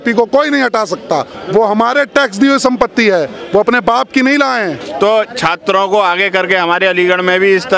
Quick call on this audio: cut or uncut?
cut